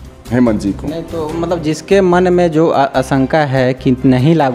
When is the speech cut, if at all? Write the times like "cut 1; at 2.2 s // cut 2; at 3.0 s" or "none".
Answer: none